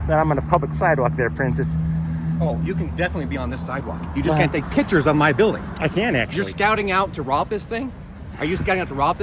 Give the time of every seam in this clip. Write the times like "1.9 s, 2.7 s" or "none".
none